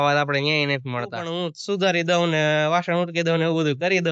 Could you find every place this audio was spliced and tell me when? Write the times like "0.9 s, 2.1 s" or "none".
1.3 s